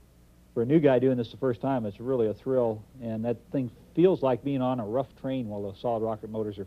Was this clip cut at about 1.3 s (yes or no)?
no